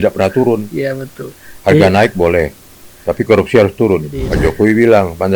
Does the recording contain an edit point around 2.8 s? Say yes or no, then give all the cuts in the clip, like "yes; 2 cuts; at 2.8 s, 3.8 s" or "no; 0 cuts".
no; 1 cut; at 4.2 s